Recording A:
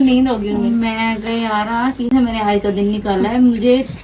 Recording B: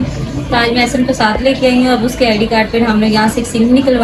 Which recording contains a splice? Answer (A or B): A